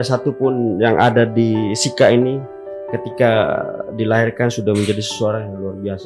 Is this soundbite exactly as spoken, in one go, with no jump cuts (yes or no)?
yes